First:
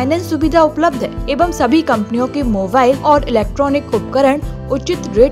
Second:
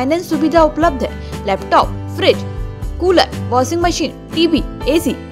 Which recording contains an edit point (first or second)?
first